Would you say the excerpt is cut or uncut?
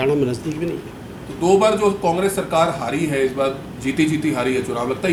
uncut